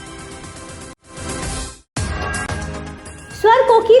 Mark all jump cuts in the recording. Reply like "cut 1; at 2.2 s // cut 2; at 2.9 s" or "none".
cut 1; at 1.0 s // cut 2; at 3.1 s